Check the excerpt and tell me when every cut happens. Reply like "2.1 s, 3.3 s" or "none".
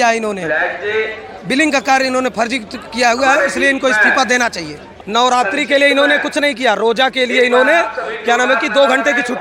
4.9 s